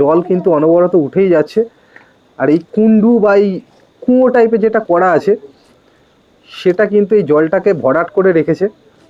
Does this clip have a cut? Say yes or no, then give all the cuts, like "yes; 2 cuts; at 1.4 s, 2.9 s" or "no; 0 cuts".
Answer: no; 0 cuts